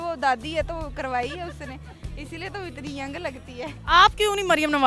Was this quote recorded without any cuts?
no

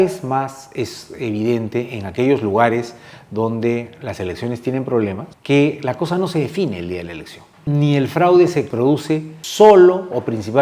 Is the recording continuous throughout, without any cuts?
no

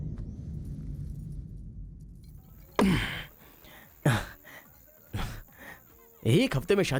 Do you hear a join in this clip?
yes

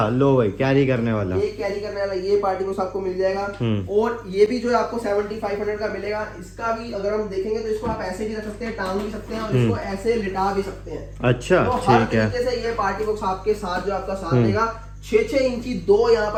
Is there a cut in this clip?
no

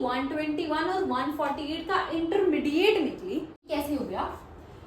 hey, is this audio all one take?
no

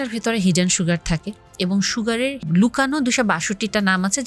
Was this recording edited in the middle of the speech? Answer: yes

